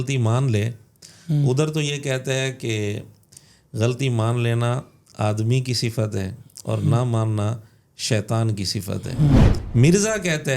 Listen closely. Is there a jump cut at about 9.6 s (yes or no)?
yes